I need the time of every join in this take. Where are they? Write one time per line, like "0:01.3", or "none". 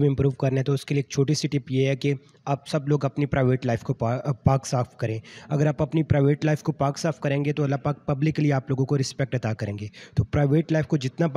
none

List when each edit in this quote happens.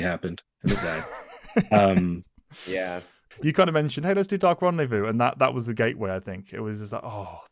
0:03.2

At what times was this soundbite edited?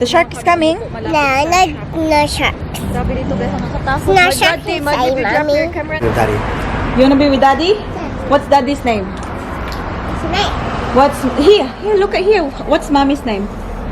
0:06.0

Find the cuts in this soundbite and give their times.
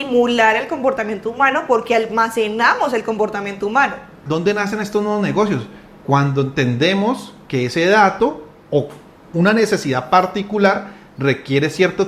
0:04.2

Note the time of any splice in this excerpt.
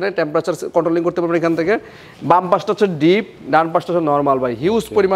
none

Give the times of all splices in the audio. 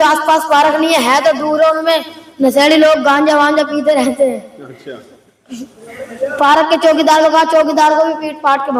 none

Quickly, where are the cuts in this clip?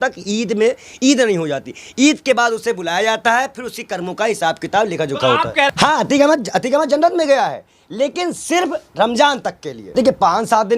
0:05.7
0:09.8

